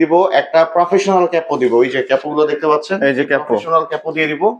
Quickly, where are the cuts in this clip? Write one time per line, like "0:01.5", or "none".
none